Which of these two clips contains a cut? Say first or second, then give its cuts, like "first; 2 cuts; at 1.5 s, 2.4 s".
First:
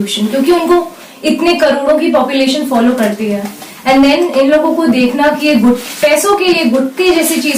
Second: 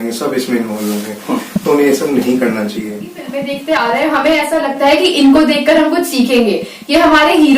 second; 1 cut; at 3.4 s